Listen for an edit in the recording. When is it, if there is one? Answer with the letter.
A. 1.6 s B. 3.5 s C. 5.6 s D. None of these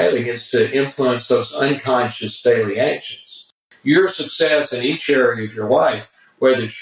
B